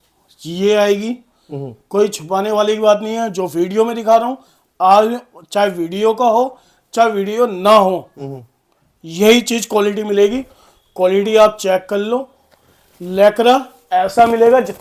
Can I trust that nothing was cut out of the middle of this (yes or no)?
yes